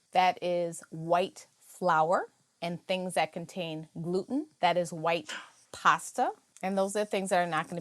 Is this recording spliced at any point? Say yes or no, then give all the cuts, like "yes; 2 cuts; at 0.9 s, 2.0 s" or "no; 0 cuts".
yes; 1 cut; at 6.5 s